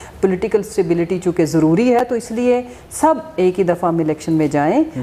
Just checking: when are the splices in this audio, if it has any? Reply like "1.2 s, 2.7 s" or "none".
none